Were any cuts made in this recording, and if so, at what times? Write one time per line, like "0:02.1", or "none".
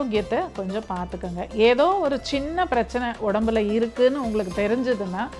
none